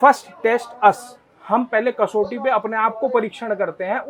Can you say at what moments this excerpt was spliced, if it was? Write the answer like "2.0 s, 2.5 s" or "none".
none